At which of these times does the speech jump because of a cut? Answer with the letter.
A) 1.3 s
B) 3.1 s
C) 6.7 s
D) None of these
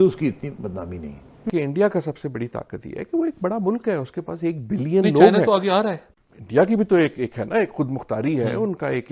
A